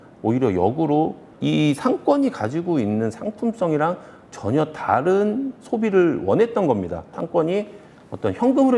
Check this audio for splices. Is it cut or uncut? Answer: cut